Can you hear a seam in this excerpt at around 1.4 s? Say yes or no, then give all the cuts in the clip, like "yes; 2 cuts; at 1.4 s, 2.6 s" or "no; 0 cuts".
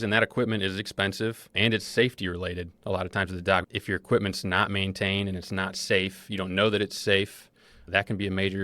yes; 2 cuts; at 1.4 s, 3.7 s